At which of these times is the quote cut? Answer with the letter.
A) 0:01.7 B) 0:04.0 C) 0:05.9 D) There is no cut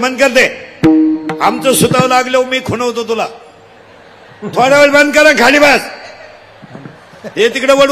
D